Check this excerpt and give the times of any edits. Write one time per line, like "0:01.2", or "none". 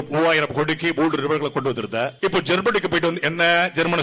0:02.1

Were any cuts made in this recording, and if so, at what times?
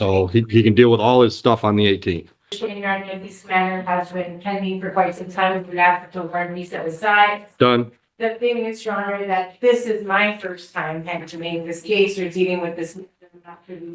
0:02.6

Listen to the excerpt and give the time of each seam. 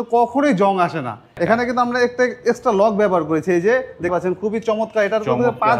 0:01.3
0:04.1

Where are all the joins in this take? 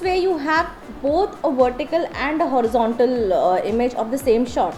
none

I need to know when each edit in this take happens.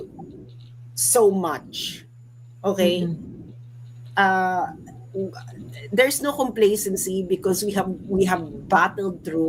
none

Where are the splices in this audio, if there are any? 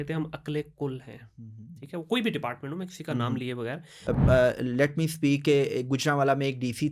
0:03.9

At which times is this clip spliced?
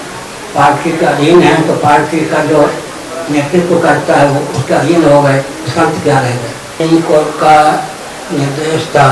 0:06.8

